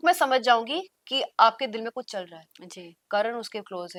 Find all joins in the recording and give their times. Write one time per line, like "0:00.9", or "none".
none